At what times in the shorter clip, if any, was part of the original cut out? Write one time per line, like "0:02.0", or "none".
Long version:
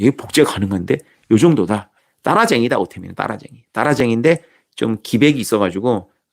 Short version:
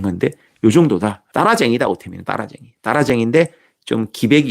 0:01.2